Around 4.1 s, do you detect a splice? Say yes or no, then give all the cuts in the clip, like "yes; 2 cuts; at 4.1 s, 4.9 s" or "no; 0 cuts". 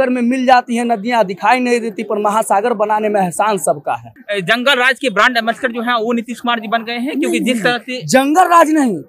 yes; 1 cut; at 4.1 s